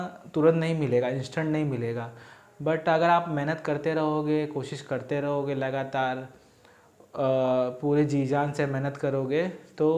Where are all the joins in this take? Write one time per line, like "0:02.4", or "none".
none